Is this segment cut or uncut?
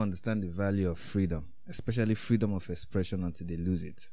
uncut